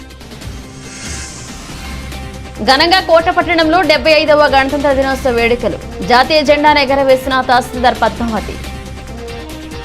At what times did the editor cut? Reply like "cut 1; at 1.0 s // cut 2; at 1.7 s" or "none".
cut 1; at 2.1 s